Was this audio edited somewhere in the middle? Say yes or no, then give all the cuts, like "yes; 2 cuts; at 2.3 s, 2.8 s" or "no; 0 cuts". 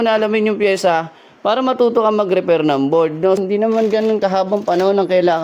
yes; 1 cut; at 3.4 s